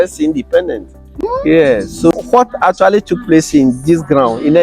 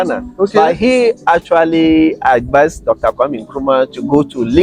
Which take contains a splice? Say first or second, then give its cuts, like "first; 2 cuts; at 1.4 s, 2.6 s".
first; 1 cut; at 2.1 s